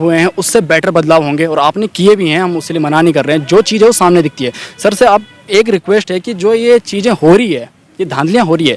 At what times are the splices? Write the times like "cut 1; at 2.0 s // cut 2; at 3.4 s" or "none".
none